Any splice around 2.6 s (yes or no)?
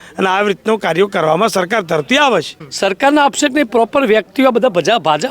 yes